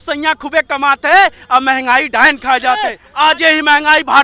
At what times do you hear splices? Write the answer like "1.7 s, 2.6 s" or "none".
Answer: 3.0 s